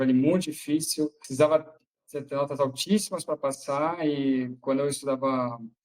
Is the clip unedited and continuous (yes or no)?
no